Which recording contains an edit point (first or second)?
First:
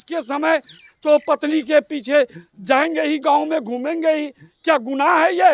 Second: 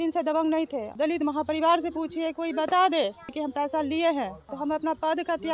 second